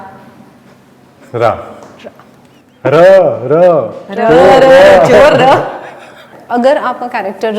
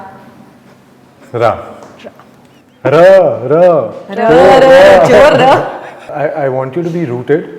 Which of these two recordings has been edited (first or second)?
second